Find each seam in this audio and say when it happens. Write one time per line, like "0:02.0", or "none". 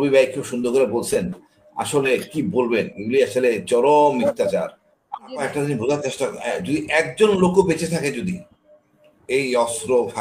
0:05.4